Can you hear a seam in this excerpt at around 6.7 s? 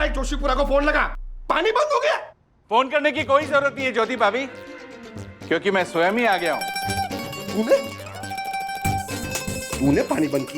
yes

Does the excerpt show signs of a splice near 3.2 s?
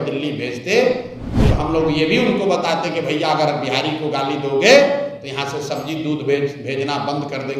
no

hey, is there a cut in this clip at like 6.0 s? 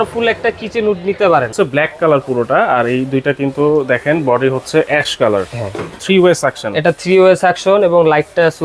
yes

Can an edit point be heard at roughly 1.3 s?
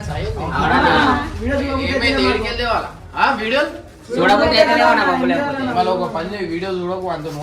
yes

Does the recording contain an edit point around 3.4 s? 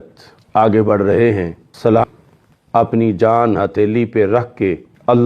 no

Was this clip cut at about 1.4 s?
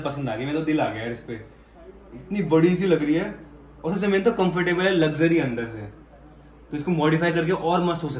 no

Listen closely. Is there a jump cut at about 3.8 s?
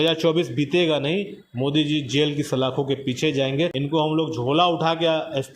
yes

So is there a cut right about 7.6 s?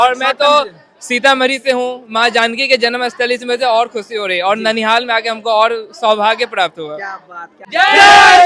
yes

